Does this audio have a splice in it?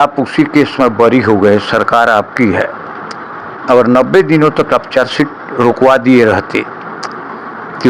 no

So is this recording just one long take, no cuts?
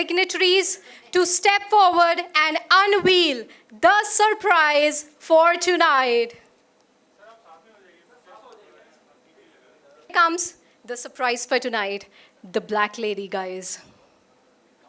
yes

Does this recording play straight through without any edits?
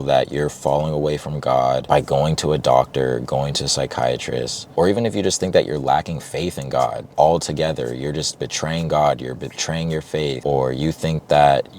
no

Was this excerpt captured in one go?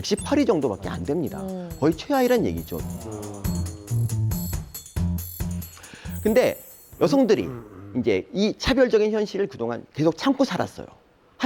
yes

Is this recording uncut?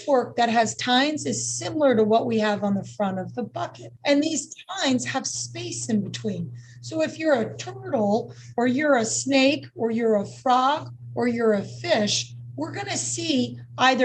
no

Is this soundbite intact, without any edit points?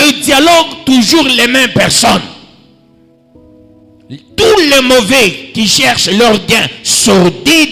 yes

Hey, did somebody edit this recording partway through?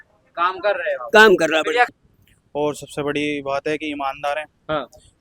yes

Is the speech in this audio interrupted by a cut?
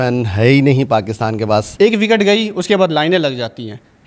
yes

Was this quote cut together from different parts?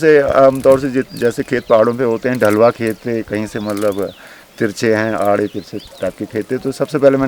no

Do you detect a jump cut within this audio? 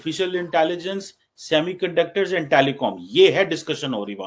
no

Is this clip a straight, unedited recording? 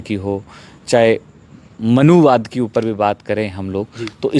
yes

